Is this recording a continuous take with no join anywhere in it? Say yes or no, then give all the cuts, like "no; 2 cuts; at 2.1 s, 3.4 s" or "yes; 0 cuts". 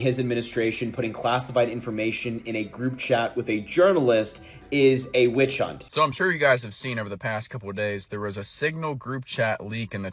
no; 1 cut; at 5.9 s